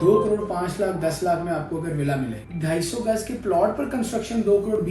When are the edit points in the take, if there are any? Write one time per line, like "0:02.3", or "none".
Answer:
0:02.4